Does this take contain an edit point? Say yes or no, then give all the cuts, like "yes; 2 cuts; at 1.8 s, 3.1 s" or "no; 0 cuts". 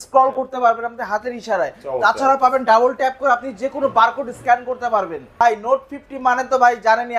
yes; 1 cut; at 5.4 s